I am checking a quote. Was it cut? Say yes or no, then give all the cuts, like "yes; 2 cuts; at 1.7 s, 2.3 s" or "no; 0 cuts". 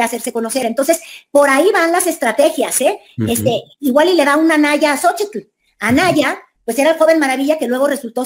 no; 0 cuts